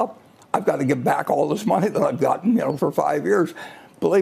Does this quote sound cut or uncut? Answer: cut